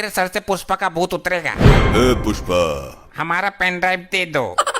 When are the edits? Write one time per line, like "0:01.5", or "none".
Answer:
0:03.0